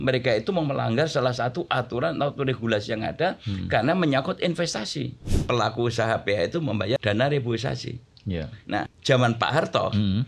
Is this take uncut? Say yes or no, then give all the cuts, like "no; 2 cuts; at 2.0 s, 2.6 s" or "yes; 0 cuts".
no; 3 cuts; at 5.3 s, 7.0 s, 8.9 s